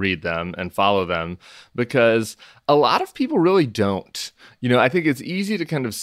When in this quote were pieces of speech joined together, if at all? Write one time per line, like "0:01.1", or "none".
0:02.6